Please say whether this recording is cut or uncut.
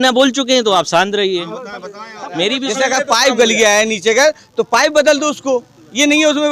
cut